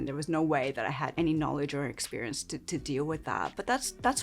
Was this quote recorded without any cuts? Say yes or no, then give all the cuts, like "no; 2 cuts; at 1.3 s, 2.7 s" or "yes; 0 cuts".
no; 1 cut; at 1.1 s